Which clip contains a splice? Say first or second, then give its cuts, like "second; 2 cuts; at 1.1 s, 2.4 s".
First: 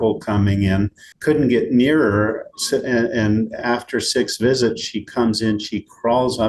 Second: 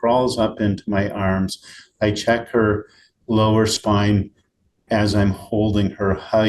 first; 1 cut; at 1.0 s